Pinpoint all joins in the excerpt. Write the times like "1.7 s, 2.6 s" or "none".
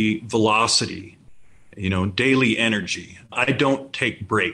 3.3 s